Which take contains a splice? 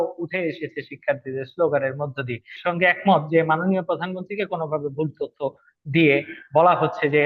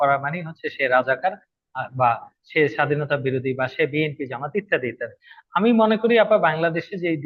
first; 1 cut; at 2.5 s

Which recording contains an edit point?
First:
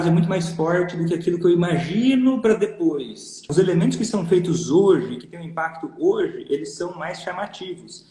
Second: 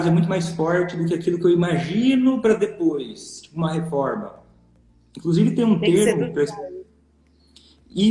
first; 1 cut; at 3.5 s

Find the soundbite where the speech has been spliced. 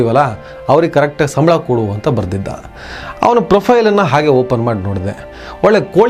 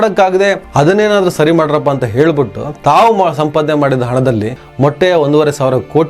second; 1 cut; at 4.6 s

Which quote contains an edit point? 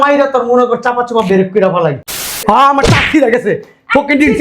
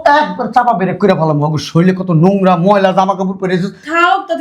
first; 1 cut; at 2.4 s

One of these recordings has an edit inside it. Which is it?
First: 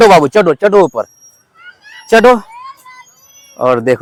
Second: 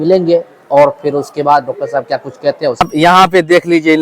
second; 1 cut; at 2.8 s

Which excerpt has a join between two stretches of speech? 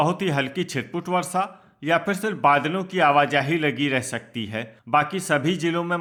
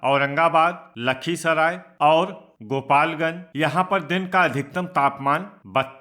second; 2 cuts; at 1.9 s, 3.4 s

